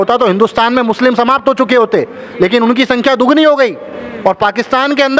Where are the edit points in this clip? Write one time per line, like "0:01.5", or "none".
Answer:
none